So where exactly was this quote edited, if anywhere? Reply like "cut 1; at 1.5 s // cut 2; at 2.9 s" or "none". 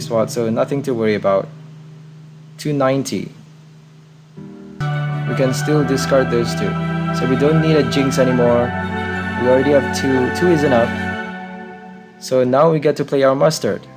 cut 1; at 4.8 s